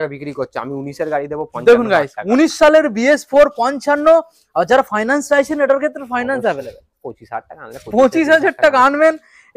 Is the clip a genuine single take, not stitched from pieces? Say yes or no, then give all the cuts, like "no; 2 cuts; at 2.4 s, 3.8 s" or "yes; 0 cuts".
yes; 0 cuts